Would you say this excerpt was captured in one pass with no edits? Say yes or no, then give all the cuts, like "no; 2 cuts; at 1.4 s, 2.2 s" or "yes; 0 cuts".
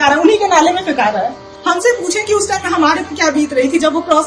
no; 1 cut; at 1.5 s